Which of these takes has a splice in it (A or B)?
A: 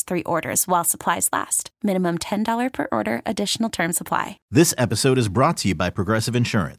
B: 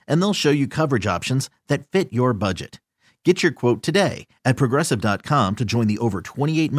A